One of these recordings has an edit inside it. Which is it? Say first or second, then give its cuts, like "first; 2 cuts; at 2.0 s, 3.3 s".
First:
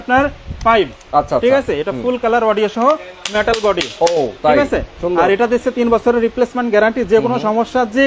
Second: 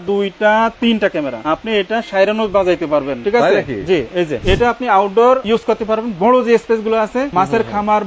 second; 5 cuts; at 1.4 s, 3.2 s, 4.4 s, 5.4 s, 7.3 s